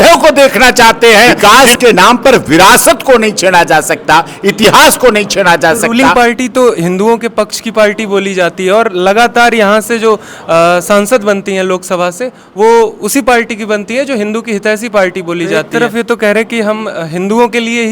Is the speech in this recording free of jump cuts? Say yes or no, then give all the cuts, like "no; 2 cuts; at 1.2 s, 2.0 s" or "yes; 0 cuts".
no; 3 cuts; at 1.4 s, 5.8 s, 15.6 s